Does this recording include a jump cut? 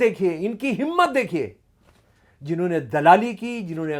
no; 0 cuts

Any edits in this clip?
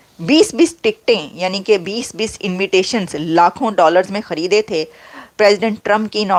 no; 0 cuts

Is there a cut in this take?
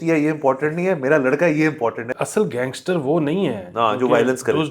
yes; 1 cut; at 2.1 s

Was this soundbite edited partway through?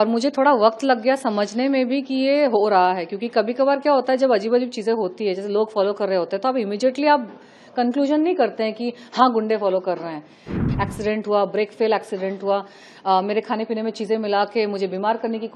yes; 1 cut; at 10.5 s

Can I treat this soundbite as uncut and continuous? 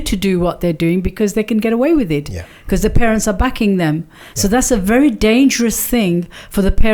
yes; 0 cuts

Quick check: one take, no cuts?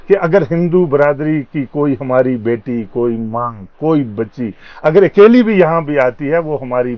yes; 0 cuts

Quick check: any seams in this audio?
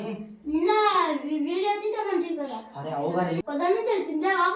yes; 1 cut; at 3.4 s

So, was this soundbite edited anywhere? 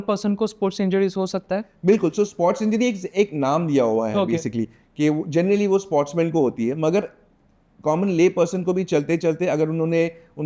no; 0 cuts

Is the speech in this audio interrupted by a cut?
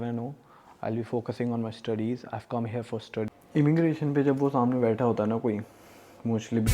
yes; 1 cut; at 3.3 s

